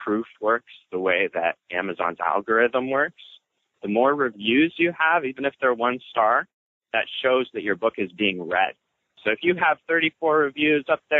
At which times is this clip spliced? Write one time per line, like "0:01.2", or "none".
0:01.7
0:09.2